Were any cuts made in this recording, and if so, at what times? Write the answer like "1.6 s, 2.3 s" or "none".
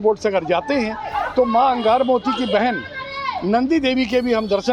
none